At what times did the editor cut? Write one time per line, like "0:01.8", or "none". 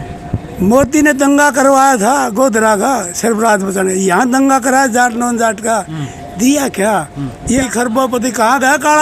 0:07.6